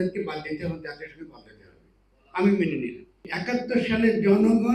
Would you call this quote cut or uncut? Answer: cut